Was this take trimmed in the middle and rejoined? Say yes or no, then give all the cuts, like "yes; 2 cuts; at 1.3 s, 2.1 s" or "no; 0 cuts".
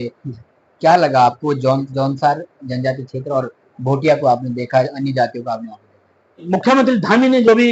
yes; 2 cuts; at 1.9 s, 6.4 s